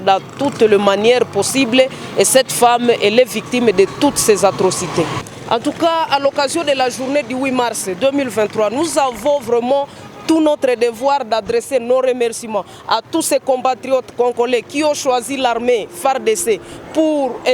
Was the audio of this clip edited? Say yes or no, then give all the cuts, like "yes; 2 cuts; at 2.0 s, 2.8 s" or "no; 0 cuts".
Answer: yes; 1 cut; at 5.2 s